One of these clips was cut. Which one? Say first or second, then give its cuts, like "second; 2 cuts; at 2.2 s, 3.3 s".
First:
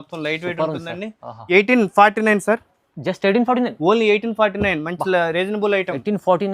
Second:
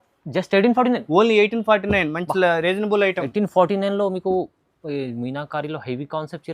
first; 1 cut; at 1.5 s